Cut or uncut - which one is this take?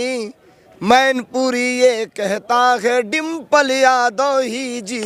uncut